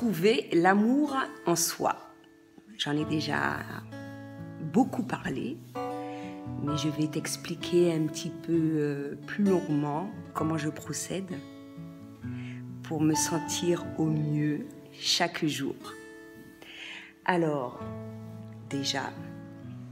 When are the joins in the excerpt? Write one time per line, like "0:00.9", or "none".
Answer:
none